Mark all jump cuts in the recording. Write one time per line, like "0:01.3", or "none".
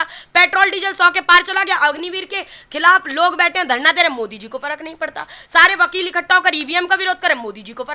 none